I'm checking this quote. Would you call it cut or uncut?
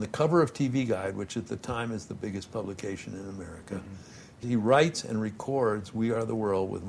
cut